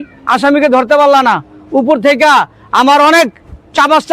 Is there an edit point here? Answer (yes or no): no